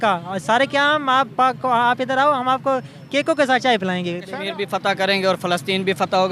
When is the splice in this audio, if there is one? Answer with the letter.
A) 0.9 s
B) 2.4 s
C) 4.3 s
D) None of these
C